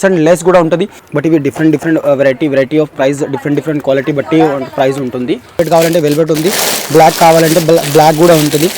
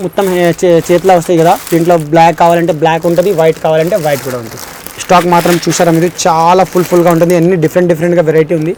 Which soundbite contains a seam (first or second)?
first